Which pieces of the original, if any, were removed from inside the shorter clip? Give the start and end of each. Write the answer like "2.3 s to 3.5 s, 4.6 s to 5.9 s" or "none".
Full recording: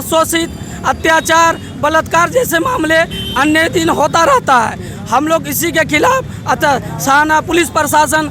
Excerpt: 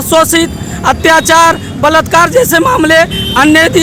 none